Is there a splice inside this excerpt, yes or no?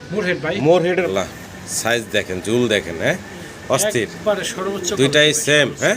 yes